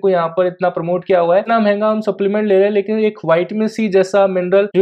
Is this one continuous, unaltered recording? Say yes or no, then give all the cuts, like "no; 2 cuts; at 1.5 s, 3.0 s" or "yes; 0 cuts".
no; 1 cut; at 1.5 s